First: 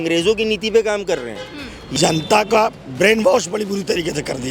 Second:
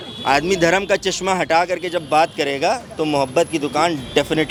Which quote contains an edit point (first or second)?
first